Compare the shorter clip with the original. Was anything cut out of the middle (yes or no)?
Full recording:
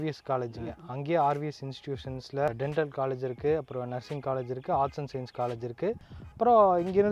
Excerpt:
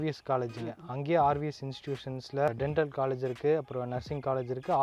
no